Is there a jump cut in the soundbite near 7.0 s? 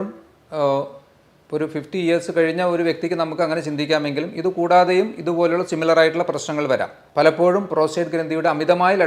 yes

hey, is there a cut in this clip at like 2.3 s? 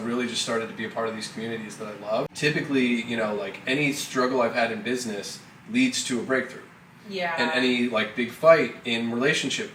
yes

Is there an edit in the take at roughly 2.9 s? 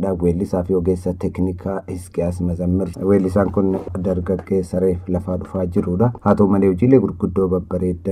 yes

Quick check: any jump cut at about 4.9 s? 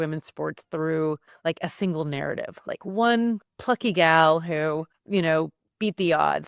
yes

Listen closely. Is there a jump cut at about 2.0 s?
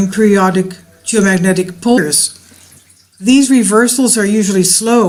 no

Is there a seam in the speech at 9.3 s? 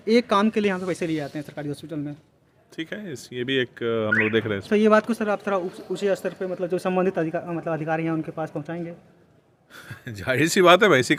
no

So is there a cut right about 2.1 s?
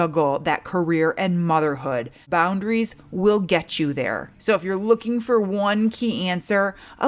yes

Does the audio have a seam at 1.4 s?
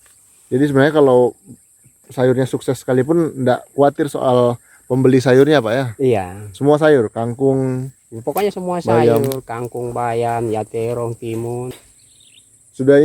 no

